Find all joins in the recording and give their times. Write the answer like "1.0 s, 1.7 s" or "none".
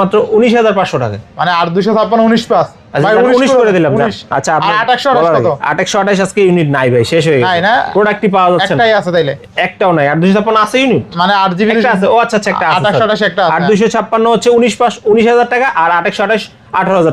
none